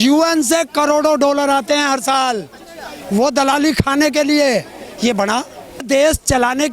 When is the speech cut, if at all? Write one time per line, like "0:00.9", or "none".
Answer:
0:05.8